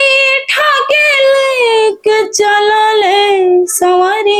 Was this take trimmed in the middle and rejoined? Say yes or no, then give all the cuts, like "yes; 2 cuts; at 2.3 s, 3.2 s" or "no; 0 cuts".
no; 0 cuts